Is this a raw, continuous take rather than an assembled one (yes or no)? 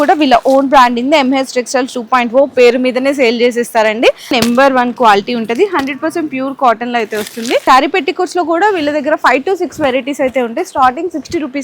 no